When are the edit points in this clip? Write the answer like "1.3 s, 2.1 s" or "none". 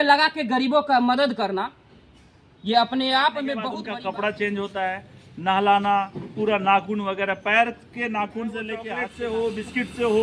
3.7 s, 9.0 s